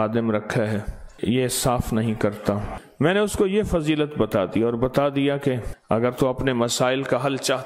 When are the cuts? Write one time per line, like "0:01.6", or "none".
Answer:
0:01.0
0:02.8
0:05.7

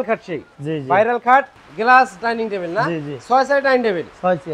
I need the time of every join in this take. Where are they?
0:01.6

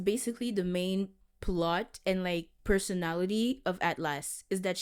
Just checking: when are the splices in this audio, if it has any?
none

